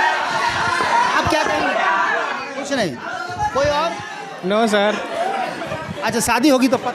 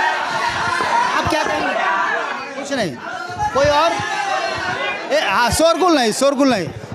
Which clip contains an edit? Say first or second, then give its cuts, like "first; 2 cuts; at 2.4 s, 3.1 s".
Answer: first; 1 cut; at 4.1 s